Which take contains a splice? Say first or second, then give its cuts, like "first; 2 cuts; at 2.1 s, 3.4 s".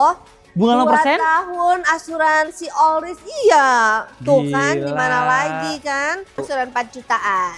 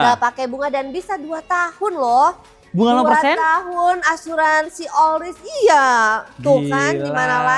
first; 1 cut; at 6.4 s